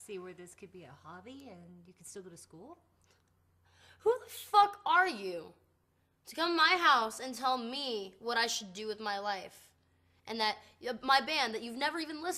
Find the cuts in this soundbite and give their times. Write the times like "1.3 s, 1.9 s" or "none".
2.4 s

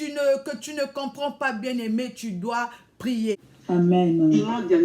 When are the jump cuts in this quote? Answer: 3.5 s

